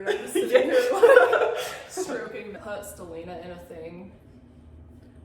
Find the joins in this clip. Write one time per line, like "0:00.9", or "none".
0:02.5